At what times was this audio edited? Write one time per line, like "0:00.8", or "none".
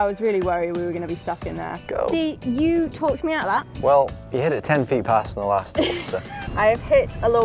0:01.8
0:06.5